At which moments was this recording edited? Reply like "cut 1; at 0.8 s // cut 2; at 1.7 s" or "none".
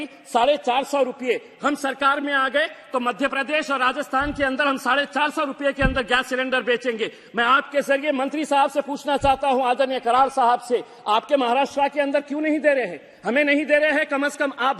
none